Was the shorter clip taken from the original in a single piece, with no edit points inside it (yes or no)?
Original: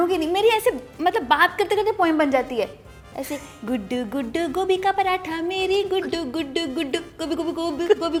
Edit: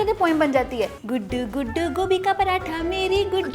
no